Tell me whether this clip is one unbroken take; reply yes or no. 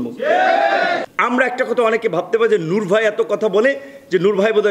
no